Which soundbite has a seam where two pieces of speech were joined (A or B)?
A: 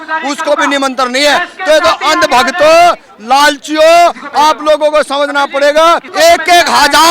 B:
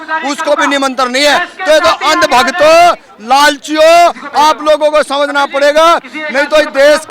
A